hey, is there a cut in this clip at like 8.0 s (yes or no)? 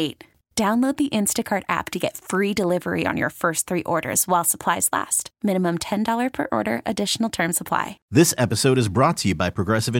yes